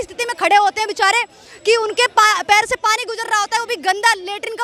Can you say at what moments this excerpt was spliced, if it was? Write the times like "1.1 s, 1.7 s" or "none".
none